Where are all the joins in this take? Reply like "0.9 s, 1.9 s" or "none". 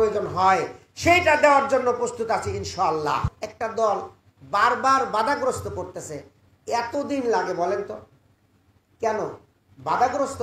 3.4 s